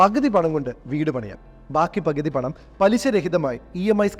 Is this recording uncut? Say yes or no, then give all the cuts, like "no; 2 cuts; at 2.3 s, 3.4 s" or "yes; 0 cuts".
yes; 0 cuts